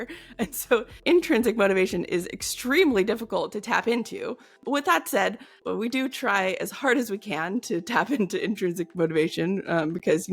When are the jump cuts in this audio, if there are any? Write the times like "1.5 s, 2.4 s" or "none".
4.5 s, 5.6 s